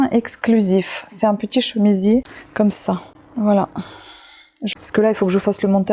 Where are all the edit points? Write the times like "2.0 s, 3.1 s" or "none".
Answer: 4.6 s